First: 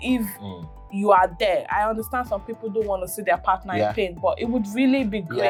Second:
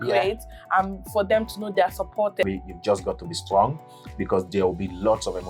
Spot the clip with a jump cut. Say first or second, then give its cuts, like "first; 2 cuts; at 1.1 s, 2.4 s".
second; 1 cut; at 2.4 s